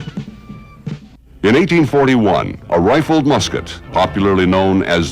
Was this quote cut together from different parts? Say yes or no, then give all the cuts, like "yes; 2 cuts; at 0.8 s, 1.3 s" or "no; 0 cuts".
yes; 1 cut; at 2.1 s